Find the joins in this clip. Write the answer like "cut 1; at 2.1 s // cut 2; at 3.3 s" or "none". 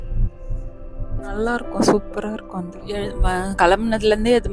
cut 1; at 3.1 s